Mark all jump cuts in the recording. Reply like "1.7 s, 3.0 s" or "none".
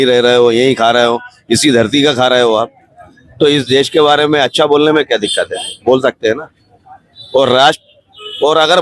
none